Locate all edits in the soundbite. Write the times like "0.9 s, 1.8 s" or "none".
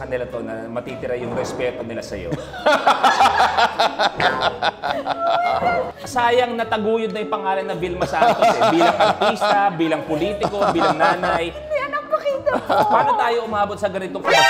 6.0 s